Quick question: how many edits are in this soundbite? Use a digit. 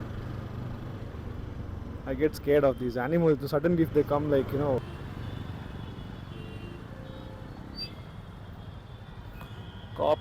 1